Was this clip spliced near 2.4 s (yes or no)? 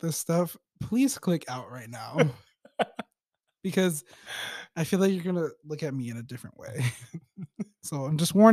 no